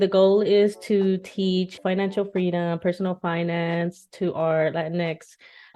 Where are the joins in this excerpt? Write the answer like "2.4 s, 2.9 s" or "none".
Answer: 1.8 s